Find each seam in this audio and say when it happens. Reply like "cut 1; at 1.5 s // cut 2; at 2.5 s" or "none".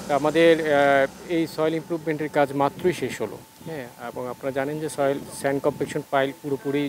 none